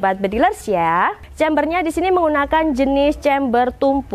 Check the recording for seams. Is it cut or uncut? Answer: cut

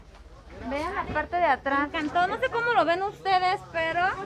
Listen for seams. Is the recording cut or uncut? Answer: cut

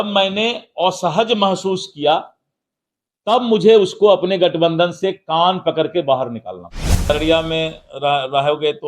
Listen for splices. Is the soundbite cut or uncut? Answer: cut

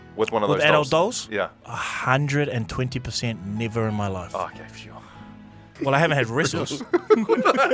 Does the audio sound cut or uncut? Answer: cut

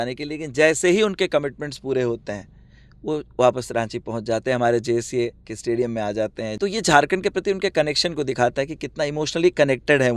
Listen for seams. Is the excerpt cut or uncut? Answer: cut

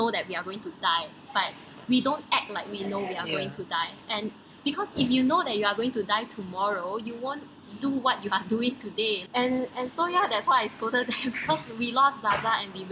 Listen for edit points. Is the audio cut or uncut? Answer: uncut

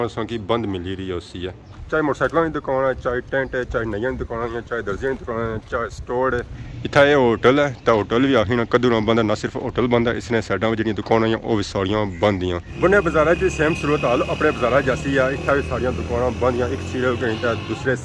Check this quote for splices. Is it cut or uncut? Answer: cut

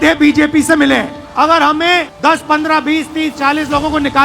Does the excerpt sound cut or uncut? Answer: cut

